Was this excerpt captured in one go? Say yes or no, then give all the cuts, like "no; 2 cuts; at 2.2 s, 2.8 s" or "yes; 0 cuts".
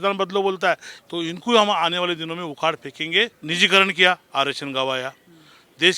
no; 2 cuts; at 1.0 s, 3.4 s